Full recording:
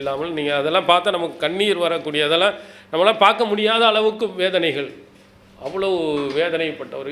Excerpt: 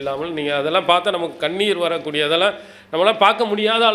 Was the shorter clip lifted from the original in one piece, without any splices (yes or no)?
yes